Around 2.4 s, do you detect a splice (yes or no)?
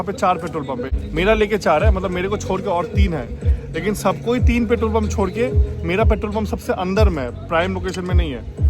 no